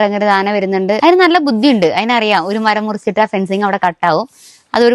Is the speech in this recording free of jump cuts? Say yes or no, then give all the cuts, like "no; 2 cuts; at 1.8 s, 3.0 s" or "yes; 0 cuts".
no; 1 cut; at 1.0 s